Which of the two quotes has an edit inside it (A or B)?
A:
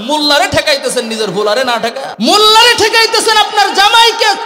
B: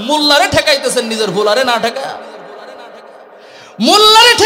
A